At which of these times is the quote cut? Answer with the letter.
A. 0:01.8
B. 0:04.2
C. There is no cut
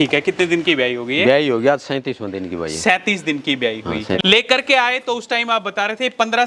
B